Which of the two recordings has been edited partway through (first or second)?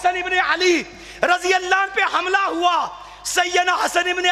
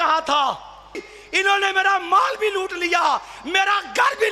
second